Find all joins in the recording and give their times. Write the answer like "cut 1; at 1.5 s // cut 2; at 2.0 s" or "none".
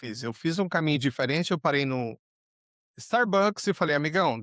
none